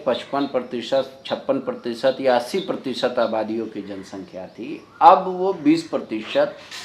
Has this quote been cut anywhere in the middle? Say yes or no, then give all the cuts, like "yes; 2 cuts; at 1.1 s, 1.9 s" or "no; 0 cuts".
no; 0 cuts